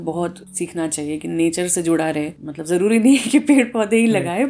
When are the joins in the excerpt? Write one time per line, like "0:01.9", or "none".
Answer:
none